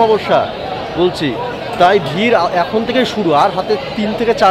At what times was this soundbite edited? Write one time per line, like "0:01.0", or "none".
none